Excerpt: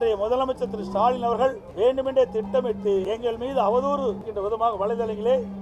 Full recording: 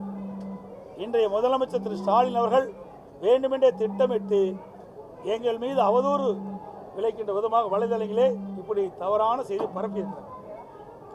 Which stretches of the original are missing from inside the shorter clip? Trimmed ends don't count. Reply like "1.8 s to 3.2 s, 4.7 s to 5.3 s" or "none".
2.8 s to 3.1 s, 4.5 s to 5.3 s, 6.5 s to 7.2 s